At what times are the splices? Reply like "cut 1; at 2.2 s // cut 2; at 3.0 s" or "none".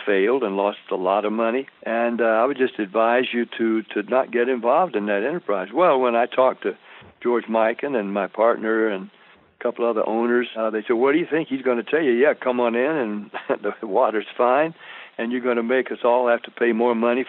cut 1; at 1.8 s // cut 2; at 10.5 s